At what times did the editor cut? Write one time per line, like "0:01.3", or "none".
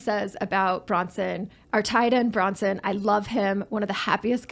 none